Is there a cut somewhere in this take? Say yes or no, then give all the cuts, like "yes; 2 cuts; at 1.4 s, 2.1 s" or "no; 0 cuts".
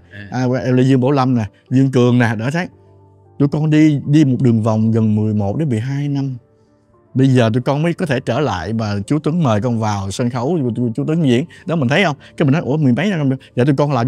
no; 0 cuts